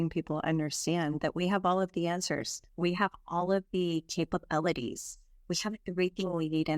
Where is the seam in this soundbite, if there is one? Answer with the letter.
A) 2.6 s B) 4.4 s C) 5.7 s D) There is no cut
A